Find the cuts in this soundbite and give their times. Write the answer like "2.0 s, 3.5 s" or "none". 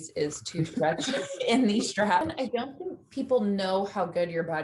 2.3 s